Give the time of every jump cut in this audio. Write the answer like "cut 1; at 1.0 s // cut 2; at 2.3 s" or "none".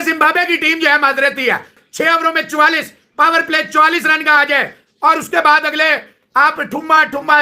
none